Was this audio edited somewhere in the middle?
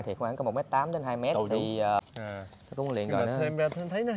yes; 1 cut; at 2.0 s

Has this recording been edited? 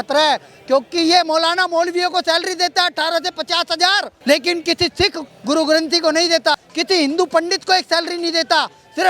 yes; 2 cuts; at 4.1 s, 6.7 s

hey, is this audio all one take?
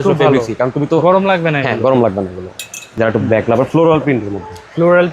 no; 1 cut; at 2.8 s

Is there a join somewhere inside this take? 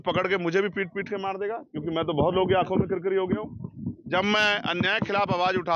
no; 0 cuts

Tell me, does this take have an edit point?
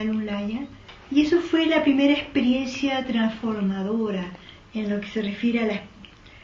yes; 1 cut; at 3.9 s

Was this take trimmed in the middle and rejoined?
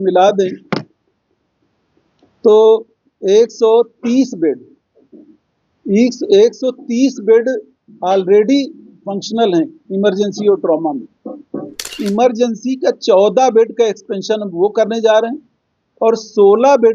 yes; 1 cut; at 11.9 s

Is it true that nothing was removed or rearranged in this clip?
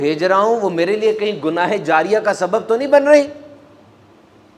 yes; 0 cuts

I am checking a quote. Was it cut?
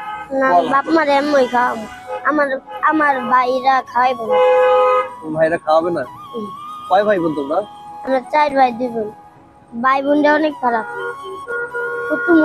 no; 0 cuts

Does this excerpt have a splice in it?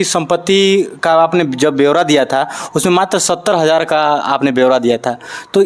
no; 0 cuts

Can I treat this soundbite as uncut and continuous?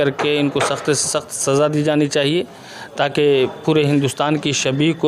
yes; 0 cuts

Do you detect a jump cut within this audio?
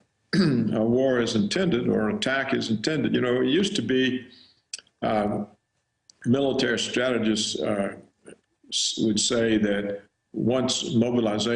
yes; 1 cut; at 10.1 s

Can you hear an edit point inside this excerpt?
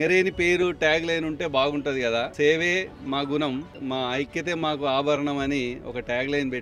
yes; 2 cuts; at 2.3 s, 3.7 s

